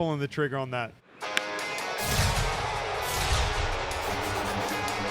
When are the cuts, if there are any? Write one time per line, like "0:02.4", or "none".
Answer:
0:01.0

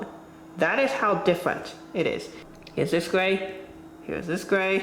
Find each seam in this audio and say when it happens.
0:02.4

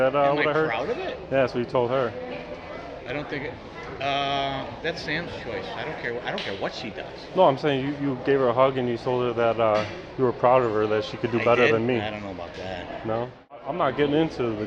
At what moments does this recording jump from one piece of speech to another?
0:13.6

